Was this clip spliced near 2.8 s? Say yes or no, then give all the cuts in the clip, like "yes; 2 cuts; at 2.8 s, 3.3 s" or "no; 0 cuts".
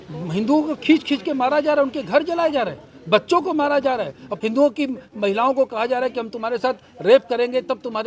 no; 1 cut; at 4.3 s